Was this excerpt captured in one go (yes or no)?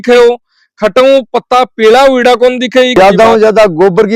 no